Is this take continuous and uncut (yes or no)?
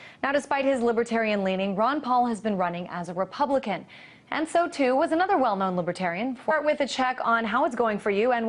yes